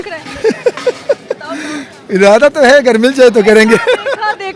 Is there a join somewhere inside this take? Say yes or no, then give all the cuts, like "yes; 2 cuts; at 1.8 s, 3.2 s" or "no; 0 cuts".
no; 0 cuts